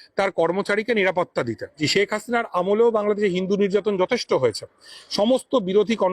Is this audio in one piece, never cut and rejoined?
no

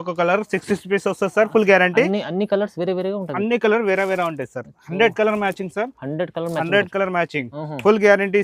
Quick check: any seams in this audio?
no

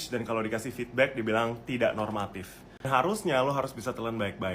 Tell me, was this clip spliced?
yes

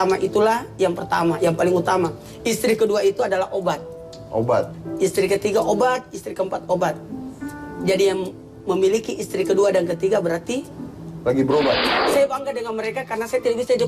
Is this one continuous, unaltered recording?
no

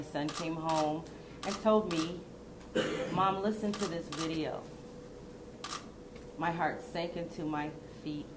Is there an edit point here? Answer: no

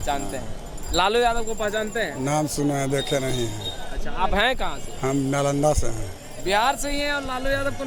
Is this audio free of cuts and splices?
yes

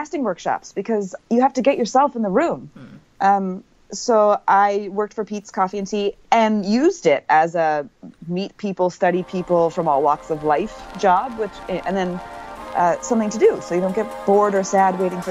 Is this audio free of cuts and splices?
yes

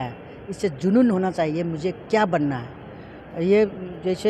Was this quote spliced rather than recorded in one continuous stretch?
no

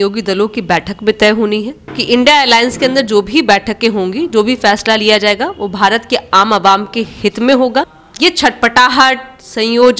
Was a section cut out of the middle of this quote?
yes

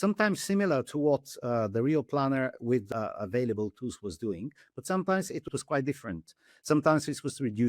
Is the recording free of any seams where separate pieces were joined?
no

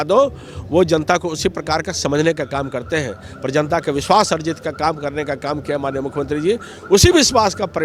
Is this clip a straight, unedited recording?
yes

